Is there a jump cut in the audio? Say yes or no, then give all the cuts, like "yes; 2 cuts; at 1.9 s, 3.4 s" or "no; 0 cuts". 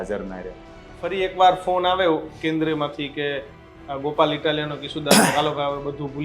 yes; 1 cut; at 1.0 s